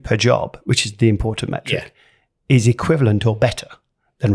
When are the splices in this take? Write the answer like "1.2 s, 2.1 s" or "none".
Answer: none